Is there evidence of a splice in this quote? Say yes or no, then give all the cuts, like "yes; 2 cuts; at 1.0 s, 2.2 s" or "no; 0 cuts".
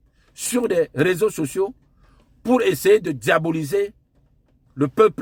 no; 0 cuts